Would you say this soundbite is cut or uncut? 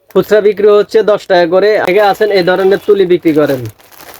cut